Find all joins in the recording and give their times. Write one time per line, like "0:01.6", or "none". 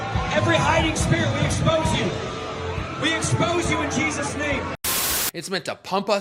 0:04.8